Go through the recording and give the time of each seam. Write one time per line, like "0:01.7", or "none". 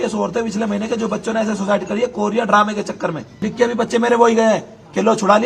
0:03.4